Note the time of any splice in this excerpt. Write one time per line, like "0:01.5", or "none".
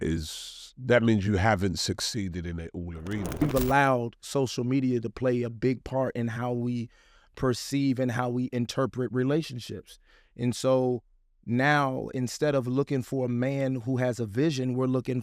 0:03.4